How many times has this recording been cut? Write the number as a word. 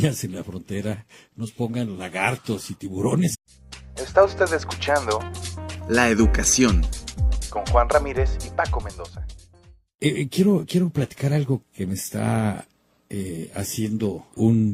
zero